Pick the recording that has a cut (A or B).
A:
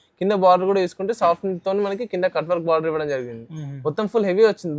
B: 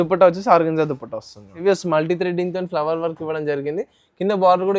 B